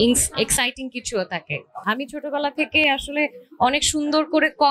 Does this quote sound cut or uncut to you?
cut